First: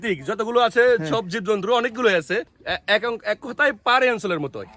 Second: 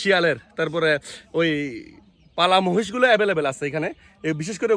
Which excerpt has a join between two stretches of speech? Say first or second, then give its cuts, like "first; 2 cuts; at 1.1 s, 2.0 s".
first; 1 cut; at 2.6 s